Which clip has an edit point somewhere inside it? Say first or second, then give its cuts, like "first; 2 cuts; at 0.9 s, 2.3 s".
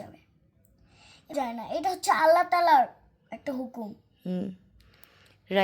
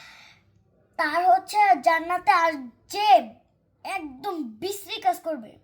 first; 1 cut; at 1.4 s